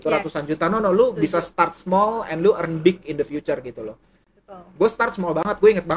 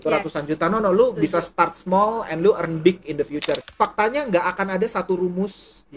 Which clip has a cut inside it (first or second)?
second